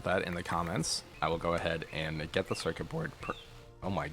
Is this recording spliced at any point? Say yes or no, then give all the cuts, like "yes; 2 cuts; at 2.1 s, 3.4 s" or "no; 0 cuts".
yes; 1 cut; at 1.0 s